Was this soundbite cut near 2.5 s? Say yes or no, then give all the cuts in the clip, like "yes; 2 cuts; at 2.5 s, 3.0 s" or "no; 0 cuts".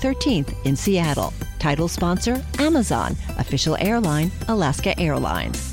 no; 0 cuts